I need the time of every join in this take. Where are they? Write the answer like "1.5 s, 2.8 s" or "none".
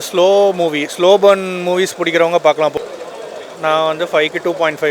2.7 s